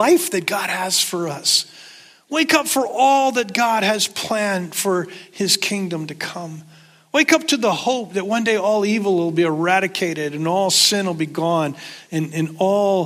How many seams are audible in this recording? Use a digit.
0